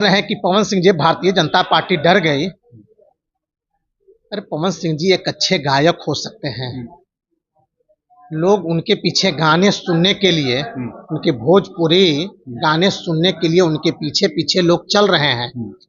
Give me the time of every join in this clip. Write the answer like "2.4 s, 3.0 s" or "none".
none

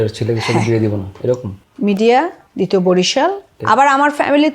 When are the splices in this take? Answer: 2.4 s, 3.5 s

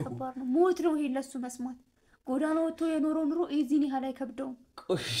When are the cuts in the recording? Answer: none

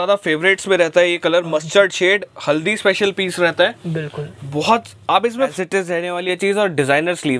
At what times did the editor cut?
5.5 s

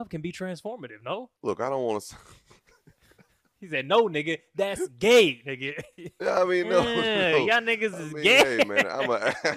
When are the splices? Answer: 1.3 s

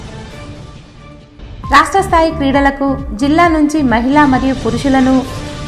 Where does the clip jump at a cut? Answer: 1.5 s

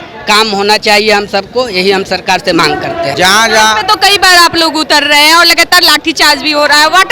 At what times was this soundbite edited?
3.1 s

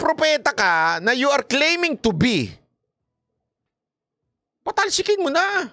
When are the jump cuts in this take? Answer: none

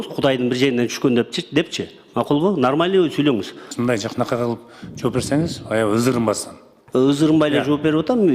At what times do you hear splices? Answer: 3.6 s

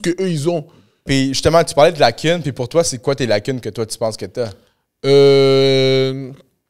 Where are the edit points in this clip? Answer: 1.1 s

